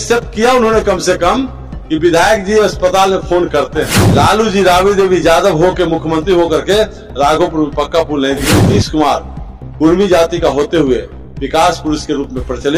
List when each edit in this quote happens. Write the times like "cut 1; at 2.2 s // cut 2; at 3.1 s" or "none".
cut 1; at 4.0 s // cut 2; at 8.6 s